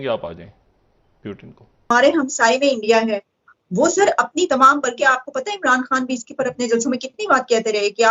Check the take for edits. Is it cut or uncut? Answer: cut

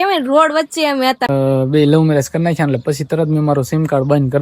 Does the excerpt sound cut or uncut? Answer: cut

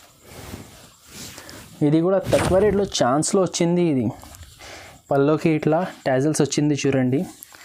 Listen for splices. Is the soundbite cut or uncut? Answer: uncut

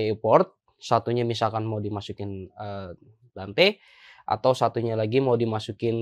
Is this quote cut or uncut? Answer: uncut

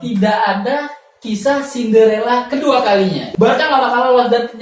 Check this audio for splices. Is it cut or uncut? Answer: cut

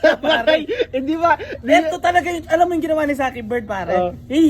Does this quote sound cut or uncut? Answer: uncut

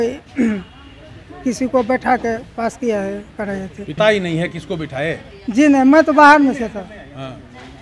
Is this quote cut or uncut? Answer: cut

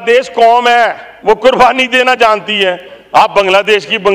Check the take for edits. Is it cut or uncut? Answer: cut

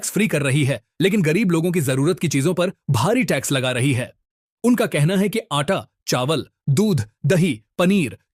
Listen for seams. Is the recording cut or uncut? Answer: uncut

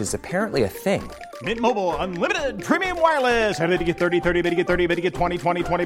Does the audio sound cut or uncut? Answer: uncut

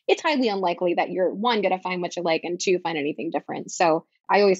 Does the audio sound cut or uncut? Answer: uncut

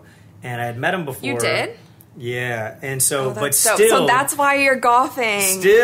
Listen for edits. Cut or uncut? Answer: uncut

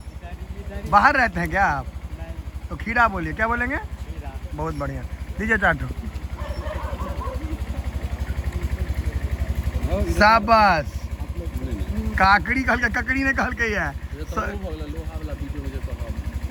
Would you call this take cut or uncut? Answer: uncut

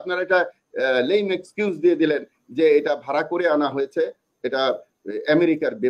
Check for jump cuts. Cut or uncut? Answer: uncut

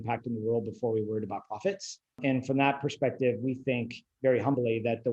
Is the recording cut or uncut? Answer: cut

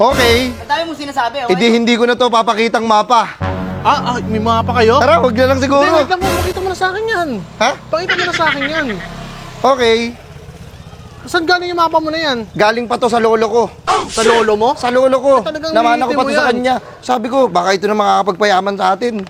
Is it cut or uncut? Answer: uncut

